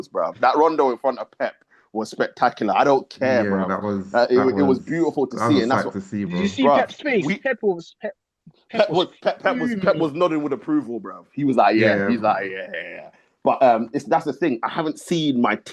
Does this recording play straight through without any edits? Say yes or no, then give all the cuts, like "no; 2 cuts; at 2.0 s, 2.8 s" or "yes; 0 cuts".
yes; 0 cuts